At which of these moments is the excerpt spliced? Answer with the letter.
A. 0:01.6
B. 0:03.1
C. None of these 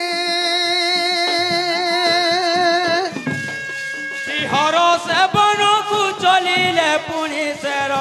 B